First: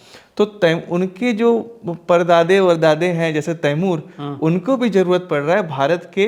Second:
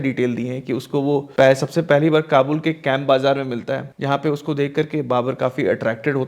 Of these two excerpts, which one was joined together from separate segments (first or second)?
second